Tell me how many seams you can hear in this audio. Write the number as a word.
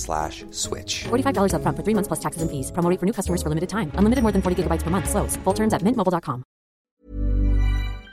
one